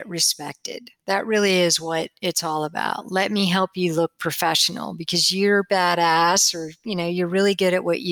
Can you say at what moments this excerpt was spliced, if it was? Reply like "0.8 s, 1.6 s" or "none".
none